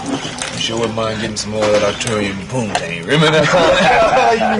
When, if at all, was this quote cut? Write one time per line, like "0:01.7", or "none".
none